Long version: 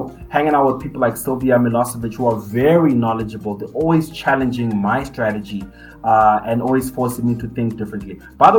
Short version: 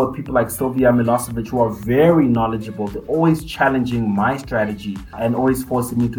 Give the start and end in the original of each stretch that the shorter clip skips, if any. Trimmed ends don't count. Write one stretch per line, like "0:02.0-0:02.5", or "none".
0:05.8-0:06.4